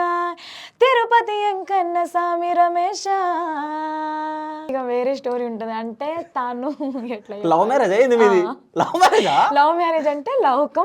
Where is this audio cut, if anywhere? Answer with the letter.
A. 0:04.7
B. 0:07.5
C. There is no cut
A